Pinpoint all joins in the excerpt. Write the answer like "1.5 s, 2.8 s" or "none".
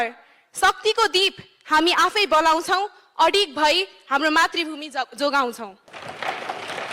5.9 s